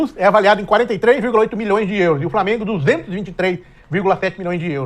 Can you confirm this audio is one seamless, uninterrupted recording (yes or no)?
yes